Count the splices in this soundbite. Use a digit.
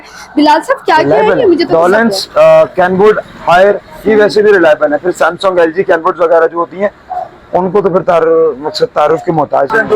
1